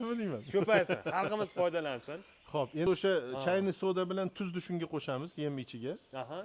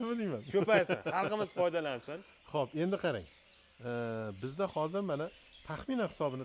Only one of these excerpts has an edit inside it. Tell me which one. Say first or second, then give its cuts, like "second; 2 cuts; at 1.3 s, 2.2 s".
first; 1 cut; at 2.9 s